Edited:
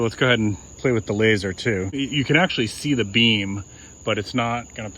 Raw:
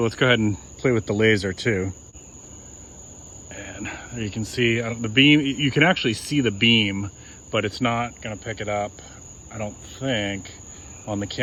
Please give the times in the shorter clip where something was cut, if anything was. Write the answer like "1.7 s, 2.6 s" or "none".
2.0 s